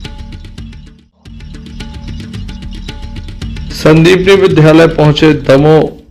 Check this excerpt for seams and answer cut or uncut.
cut